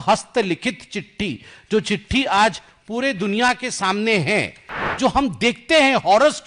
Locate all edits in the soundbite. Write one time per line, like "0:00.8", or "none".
0:04.8